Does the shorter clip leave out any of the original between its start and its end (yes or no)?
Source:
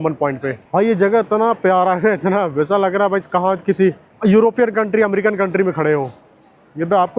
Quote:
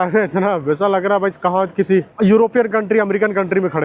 yes